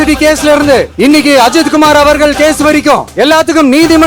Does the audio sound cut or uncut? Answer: cut